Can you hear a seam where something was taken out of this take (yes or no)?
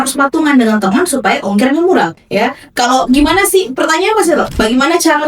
yes